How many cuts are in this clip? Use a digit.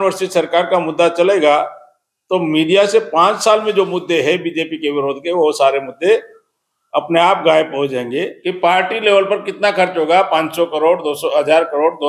1